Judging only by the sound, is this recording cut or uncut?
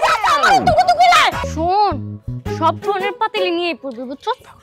cut